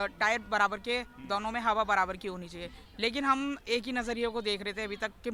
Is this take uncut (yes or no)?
yes